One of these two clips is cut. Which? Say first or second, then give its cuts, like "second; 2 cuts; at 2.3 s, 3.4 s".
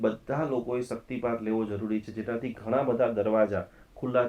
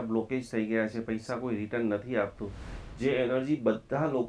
second; 1 cut; at 2.7 s